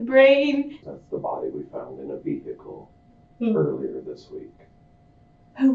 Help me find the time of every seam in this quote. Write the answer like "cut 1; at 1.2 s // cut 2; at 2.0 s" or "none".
cut 1; at 0.9 s